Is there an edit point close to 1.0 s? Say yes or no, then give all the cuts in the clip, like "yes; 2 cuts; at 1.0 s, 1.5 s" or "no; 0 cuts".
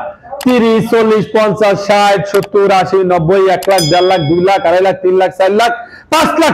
no; 0 cuts